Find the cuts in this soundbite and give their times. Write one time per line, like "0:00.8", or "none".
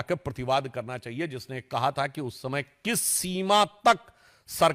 none

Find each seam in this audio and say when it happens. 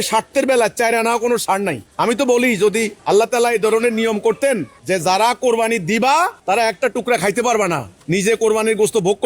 0:01.8
0:02.9
0:04.7
0:06.4
0:07.9

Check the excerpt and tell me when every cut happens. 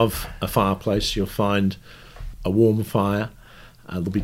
0:02.3

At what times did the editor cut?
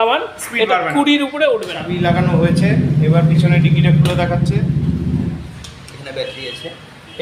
0:01.8

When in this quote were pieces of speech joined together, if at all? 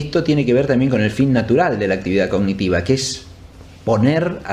0:03.5

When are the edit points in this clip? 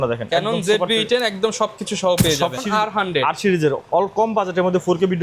0:02.6

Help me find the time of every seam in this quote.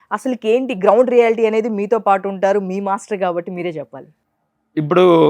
0:04.4

